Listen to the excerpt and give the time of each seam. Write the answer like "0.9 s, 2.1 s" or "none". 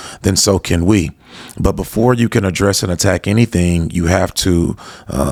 none